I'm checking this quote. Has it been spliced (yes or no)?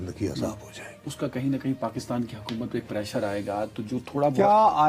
yes